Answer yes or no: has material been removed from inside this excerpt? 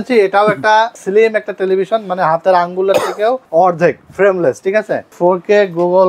yes